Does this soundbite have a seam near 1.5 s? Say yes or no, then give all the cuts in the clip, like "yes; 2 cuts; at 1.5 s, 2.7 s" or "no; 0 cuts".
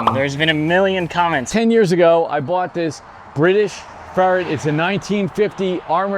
yes; 1 cut; at 1.5 s